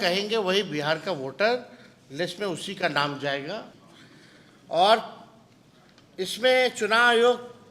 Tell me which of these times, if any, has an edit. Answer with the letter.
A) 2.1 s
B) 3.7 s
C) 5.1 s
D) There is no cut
B